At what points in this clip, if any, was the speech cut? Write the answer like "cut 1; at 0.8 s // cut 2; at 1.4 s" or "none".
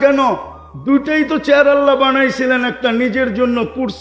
none